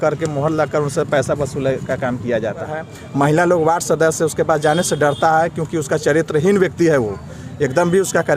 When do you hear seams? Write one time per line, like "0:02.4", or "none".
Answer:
0:02.8

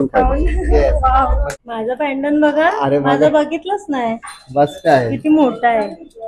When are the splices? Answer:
0:01.5

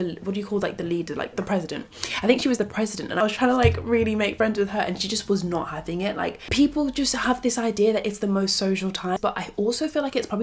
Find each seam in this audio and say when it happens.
0:03.2
0:06.4
0:09.2

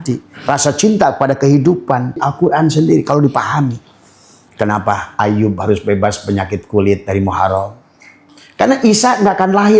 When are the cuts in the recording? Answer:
0:02.3

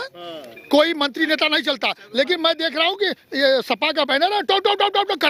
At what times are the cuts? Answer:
none

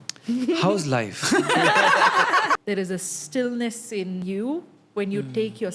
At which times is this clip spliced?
0:02.6
0:04.2

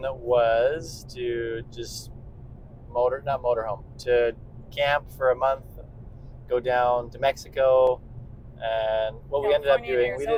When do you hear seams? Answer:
none

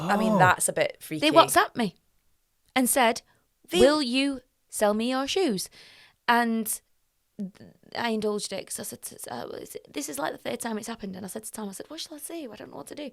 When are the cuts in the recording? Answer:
none

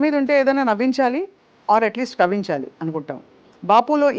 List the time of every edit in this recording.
none

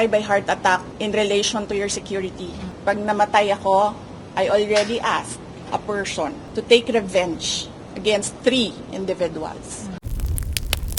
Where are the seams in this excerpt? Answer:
0:00.9
0:02.7
0:05.5
0:06.4
0:08.4
0:10.0

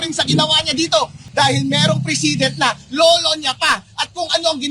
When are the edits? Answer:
0:01.2

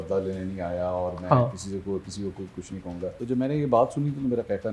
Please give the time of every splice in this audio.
0:03.1

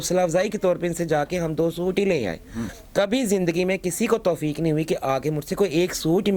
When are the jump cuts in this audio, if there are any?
0:02.7

